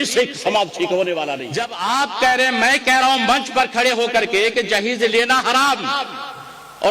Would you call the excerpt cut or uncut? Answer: cut